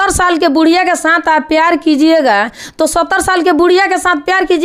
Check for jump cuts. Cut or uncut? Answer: uncut